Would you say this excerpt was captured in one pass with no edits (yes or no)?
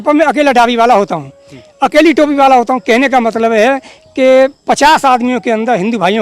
yes